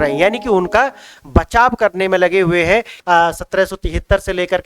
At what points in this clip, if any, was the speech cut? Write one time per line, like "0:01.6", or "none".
0:02.9